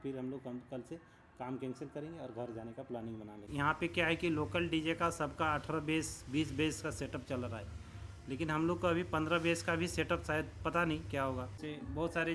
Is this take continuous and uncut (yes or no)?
no